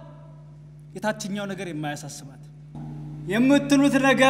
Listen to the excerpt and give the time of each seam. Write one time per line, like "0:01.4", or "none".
0:02.7